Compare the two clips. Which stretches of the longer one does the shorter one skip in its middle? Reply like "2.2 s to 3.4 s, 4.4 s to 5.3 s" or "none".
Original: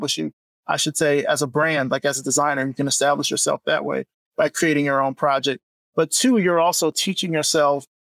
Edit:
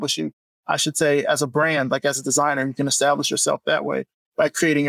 none